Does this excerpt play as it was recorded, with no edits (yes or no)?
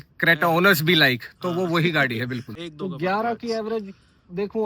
no